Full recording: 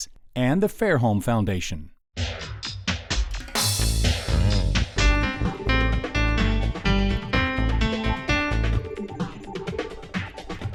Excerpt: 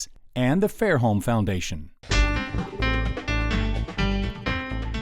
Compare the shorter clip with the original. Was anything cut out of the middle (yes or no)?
yes